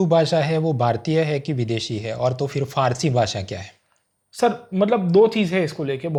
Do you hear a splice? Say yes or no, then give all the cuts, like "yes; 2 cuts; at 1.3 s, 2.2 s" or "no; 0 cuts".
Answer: no; 0 cuts